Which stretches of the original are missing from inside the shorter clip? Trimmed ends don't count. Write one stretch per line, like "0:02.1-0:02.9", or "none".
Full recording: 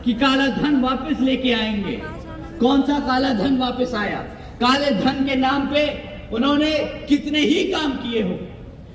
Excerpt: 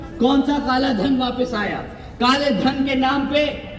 none